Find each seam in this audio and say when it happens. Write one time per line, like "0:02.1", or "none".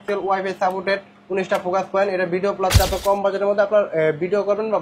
0:02.8